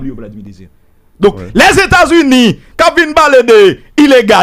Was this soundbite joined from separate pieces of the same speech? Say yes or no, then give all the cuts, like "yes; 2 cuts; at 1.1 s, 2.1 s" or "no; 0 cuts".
no; 0 cuts